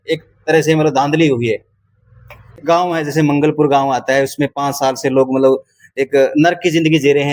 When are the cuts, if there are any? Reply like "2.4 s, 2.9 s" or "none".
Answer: 2.6 s